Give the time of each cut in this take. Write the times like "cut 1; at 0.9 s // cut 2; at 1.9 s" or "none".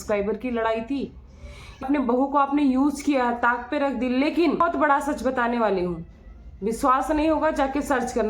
cut 1; at 1.8 s // cut 2; at 4.6 s

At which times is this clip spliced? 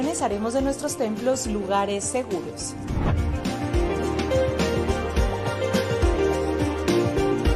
none

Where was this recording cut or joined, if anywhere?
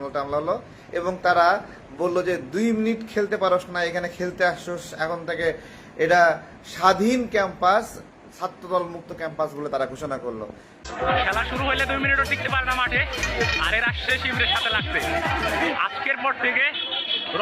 none

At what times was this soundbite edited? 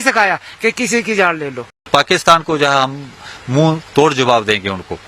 cut 1; at 1.9 s

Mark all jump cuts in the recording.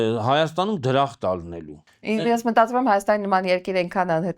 cut 1; at 1.8 s

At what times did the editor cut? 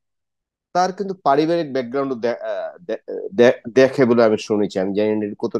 none

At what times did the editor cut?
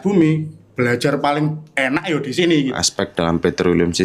cut 1; at 2.8 s

